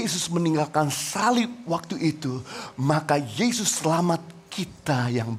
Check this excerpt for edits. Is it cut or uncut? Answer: uncut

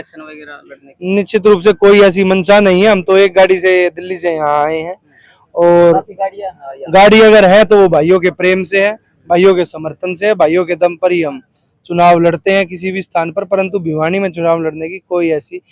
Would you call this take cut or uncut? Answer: uncut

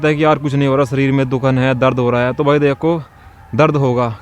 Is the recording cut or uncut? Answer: uncut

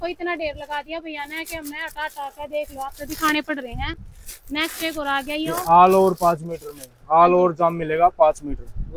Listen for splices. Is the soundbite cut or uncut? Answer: uncut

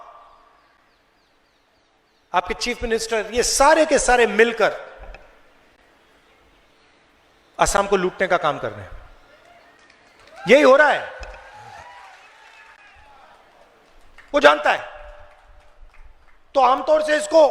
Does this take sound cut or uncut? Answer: cut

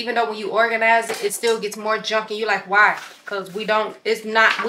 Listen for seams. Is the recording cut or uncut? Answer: uncut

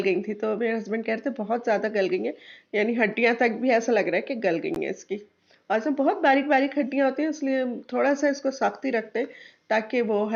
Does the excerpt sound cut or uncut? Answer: uncut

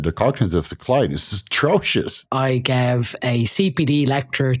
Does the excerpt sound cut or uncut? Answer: cut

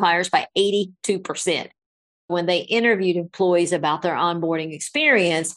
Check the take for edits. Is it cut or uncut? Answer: cut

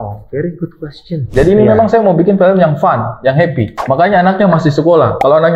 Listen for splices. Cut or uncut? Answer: cut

